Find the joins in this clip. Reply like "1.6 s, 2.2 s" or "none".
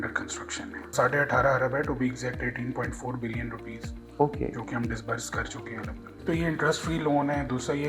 0.9 s, 6.2 s